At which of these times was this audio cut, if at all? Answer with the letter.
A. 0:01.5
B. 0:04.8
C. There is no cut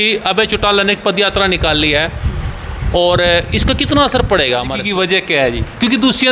B